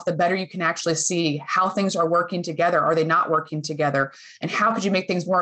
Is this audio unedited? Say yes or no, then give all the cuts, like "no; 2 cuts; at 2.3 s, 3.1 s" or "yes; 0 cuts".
yes; 0 cuts